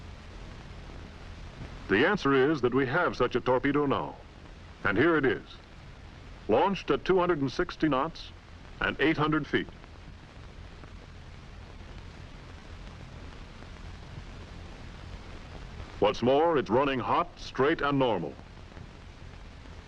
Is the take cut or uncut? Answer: uncut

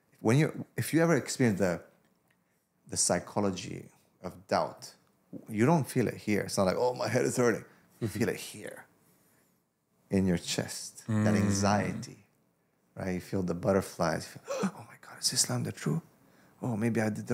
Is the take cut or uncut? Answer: uncut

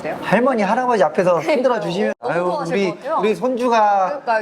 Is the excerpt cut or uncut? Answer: cut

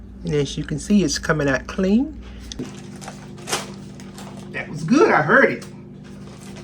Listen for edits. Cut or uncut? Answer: cut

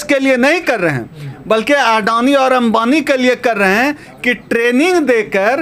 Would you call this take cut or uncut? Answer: uncut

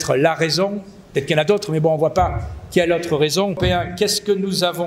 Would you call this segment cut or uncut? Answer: cut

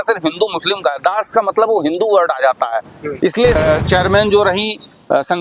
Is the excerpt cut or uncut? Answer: cut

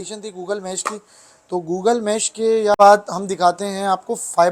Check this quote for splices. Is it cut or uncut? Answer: cut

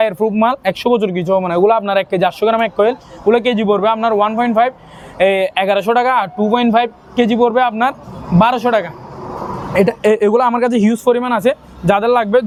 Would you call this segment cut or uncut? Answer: uncut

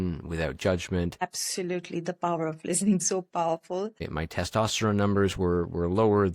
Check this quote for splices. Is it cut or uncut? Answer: cut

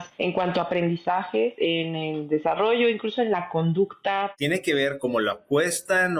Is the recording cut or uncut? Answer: cut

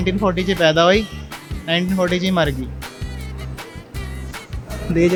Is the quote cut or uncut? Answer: uncut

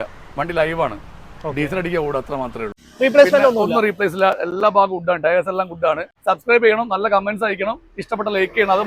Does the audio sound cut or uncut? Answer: cut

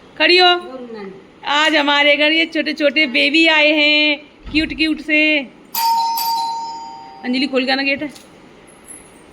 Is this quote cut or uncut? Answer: uncut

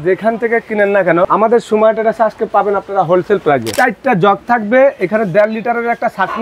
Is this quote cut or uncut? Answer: cut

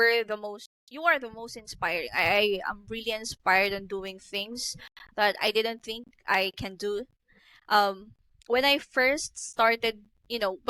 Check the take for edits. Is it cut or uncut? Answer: uncut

